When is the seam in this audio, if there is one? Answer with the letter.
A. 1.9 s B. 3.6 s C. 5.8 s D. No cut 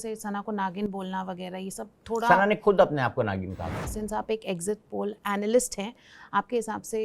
B